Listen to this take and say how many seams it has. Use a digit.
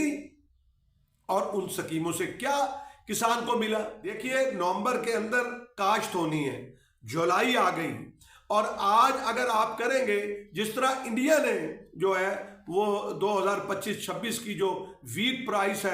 1